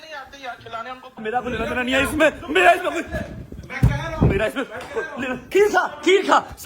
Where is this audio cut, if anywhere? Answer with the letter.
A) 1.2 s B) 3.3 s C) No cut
A